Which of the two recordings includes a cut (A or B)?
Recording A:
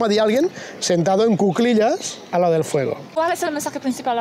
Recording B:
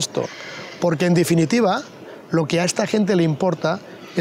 A